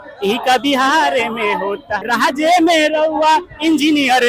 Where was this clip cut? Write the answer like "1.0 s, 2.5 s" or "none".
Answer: 1.9 s